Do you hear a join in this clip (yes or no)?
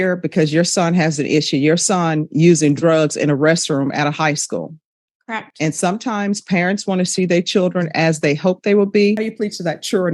yes